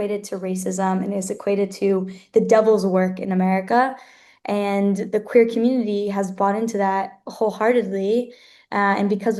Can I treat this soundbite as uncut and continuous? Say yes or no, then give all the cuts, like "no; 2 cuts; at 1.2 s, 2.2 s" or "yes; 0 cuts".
yes; 0 cuts